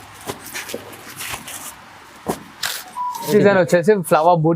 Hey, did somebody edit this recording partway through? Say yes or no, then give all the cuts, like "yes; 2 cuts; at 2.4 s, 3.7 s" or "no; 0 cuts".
yes; 1 cut; at 3.3 s